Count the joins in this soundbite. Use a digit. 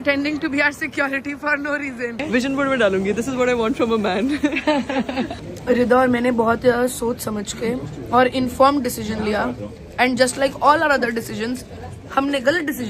2